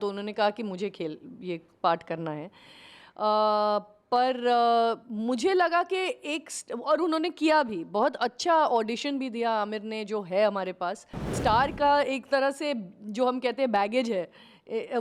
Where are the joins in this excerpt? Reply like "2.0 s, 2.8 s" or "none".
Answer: 11.4 s

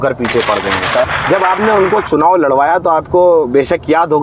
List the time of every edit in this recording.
1.0 s

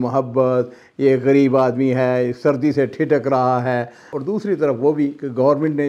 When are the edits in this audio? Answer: 4.1 s

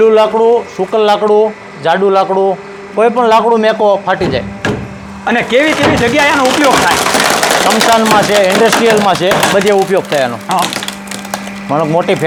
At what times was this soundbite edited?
none

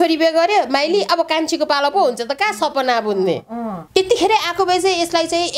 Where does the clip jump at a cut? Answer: 3.8 s

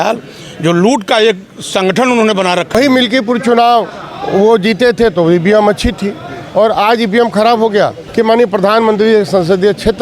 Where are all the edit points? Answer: 2.7 s, 8.0 s

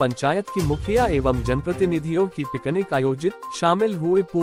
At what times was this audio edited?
none

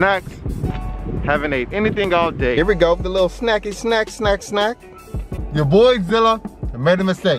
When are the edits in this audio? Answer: 2.1 s, 5.4 s

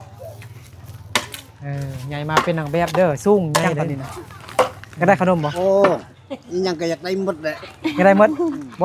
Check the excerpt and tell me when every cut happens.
4.8 s

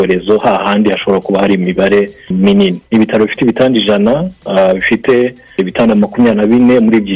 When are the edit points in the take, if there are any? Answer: 2.8 s

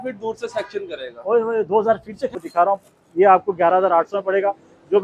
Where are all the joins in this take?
2.4 s

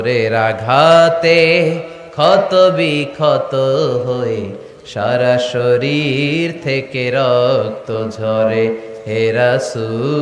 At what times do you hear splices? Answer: none

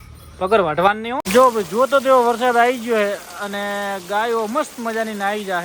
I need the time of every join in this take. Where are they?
1.2 s

